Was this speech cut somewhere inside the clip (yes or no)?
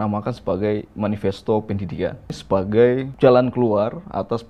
yes